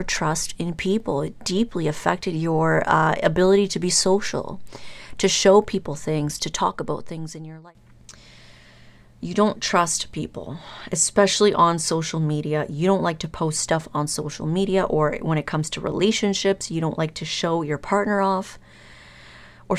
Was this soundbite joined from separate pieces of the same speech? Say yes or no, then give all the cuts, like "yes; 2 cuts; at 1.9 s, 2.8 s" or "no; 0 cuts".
yes; 1 cut; at 7.3 s